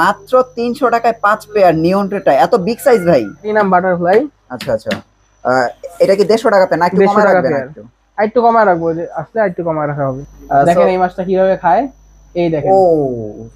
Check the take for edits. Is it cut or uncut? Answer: cut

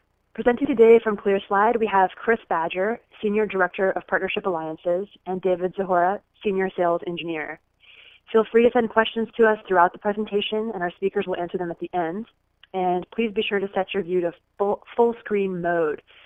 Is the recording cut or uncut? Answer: uncut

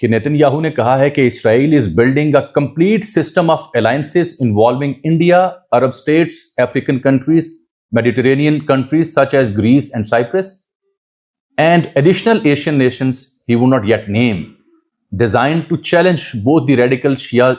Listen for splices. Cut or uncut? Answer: uncut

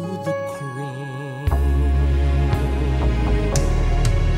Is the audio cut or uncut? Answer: uncut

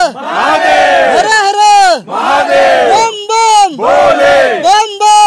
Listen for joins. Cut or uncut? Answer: uncut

